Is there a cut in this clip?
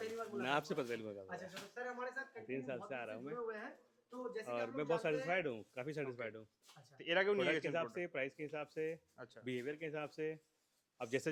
no; 0 cuts

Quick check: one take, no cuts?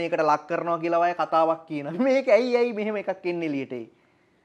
yes; 0 cuts

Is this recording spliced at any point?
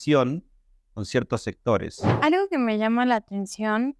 yes; 1 cut; at 2.0 s

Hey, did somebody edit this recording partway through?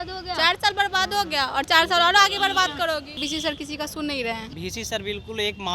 yes; 2 cuts; at 3.2 s, 4.5 s

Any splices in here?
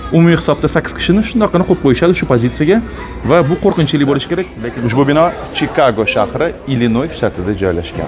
yes; 1 cut; at 4.6 s

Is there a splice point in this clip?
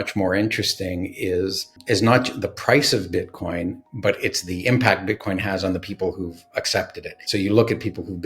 yes; 2 cuts; at 1.8 s, 7.1 s

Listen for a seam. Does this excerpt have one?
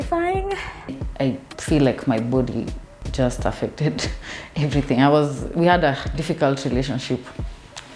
yes; 1 cut; at 1.0 s

